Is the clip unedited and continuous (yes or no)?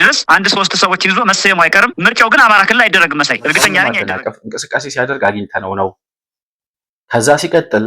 no